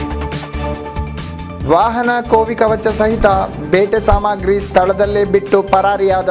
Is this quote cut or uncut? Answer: uncut